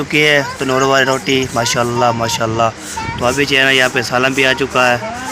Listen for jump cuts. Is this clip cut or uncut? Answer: uncut